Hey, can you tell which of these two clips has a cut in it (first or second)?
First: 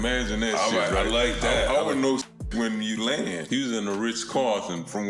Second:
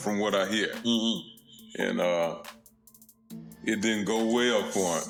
first